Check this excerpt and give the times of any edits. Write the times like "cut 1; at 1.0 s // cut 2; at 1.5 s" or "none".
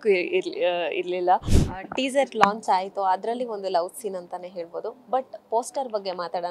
cut 1; at 1.6 s